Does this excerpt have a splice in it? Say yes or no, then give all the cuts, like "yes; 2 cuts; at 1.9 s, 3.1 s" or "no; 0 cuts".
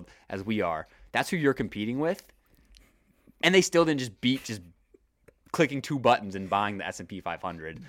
no; 0 cuts